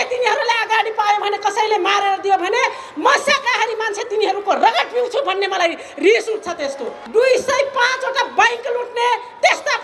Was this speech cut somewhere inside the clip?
yes; 1 cut; at 7.0 s

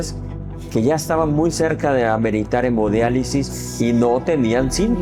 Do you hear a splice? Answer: no; 0 cuts

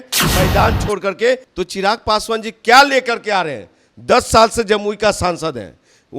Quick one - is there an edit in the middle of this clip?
yes; 1 cut; at 1.5 s

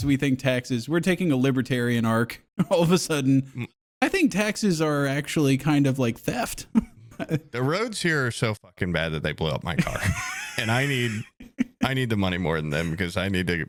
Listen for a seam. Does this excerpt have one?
no; 0 cuts

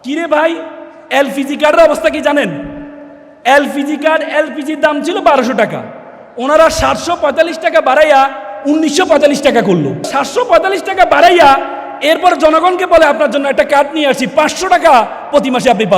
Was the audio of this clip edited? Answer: yes; 1 cut; at 10.1 s

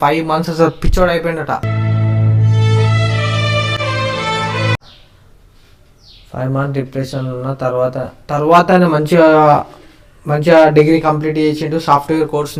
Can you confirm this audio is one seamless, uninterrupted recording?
yes; 0 cuts

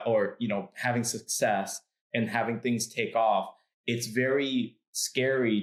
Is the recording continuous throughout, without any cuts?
yes; 0 cuts

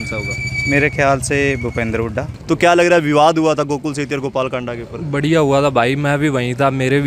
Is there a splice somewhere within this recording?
yes; 1 cut; at 2.3 s

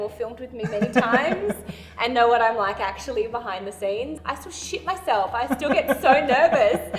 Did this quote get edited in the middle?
yes; 1 cut; at 4.2 s

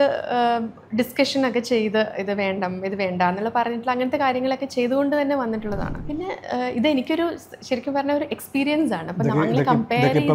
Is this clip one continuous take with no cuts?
no; 1 cut; at 5.9 s

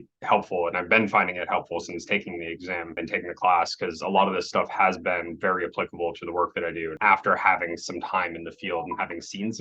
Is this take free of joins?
no; 2 cuts; at 3.0 s, 6.9 s

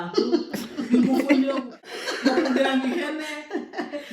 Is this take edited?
yes; 1 cut; at 2.0 s

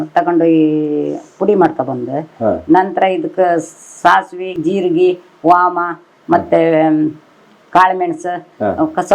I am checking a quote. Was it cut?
yes; 1 cut; at 4.6 s

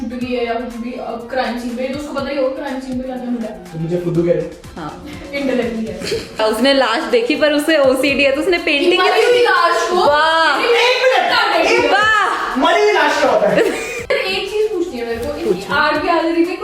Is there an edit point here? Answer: yes; 2 cuts; at 6.4 s, 14.1 s

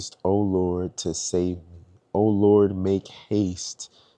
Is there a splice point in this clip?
no; 0 cuts

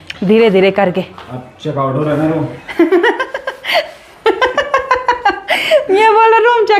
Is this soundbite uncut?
yes; 0 cuts

